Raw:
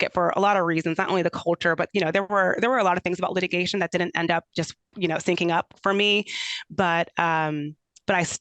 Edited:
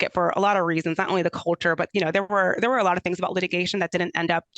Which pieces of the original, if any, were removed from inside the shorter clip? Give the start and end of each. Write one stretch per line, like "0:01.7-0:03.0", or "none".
none